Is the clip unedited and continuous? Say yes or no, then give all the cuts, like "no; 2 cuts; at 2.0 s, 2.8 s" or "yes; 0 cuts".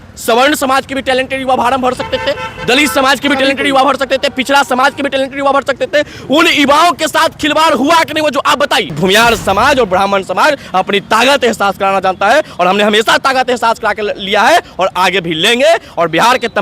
no; 1 cut; at 8.9 s